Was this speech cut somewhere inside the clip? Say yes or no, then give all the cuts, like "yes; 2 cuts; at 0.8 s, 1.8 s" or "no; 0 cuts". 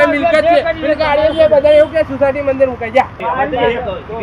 yes; 1 cut; at 3.1 s